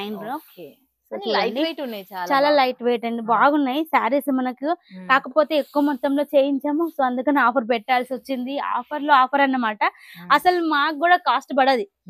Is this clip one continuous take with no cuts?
yes; 0 cuts

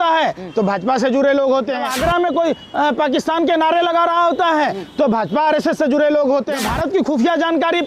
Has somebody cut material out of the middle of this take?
yes; 2 cuts; at 1.9 s, 6.6 s

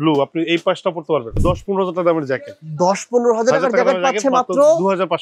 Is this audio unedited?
no; 1 cut; at 1.4 s

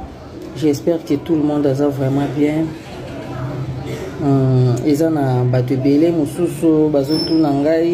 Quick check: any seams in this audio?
no; 0 cuts

